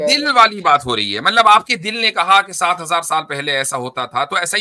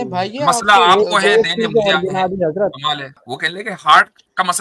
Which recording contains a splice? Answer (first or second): second